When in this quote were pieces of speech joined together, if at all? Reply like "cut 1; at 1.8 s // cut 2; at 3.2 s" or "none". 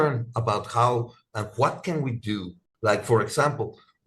cut 1; at 2.7 s